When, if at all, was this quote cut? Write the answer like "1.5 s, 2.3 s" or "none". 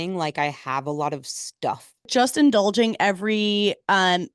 2.1 s